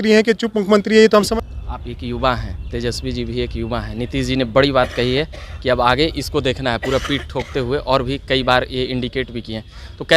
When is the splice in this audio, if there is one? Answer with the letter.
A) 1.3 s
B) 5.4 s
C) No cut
A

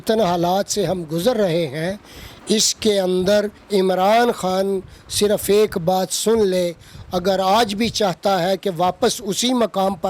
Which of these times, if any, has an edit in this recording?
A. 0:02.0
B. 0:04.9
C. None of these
C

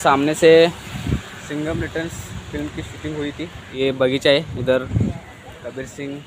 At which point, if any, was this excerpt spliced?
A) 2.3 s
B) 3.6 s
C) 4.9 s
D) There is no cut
B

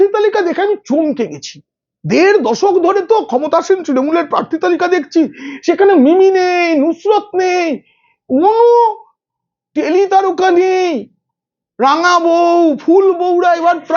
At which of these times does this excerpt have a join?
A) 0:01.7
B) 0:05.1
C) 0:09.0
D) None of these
D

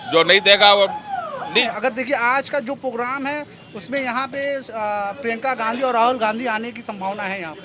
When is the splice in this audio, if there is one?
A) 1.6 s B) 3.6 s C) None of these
A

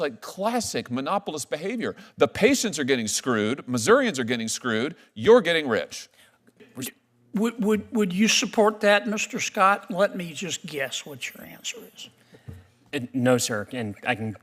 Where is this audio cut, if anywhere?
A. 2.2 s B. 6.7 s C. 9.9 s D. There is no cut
B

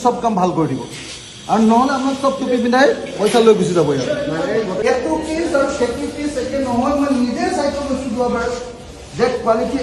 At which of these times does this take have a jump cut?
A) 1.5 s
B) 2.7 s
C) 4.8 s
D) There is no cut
D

